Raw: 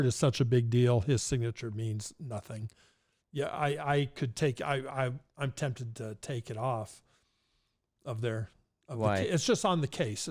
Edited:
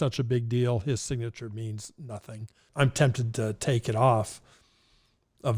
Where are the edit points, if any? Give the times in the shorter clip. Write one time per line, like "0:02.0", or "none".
0:02.6